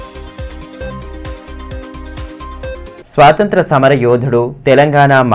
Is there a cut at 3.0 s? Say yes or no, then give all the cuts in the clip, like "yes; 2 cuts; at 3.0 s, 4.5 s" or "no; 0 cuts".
yes; 1 cut; at 3.0 s